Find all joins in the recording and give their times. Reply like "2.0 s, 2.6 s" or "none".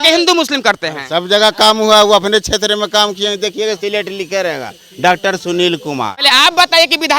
6.1 s

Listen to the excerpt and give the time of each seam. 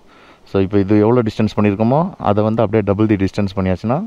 none

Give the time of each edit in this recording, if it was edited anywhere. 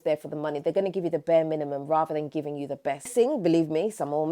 3.1 s

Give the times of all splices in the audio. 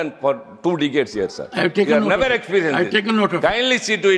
none

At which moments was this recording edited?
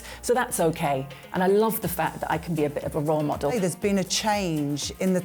3.5 s

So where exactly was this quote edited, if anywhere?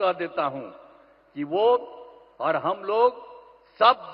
none

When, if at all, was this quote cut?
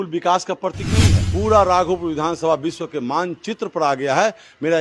1.2 s

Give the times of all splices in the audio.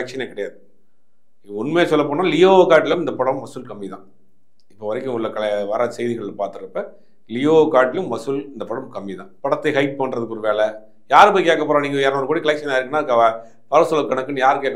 9.2 s

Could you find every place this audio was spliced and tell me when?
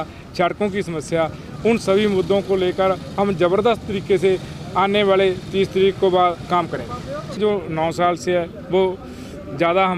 7.4 s

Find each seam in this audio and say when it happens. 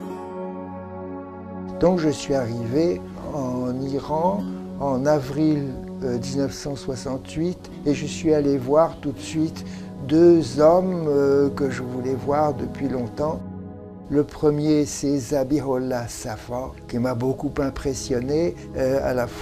7.0 s

